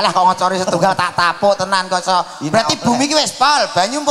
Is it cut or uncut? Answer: uncut